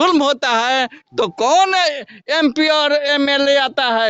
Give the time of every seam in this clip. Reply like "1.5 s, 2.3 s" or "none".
none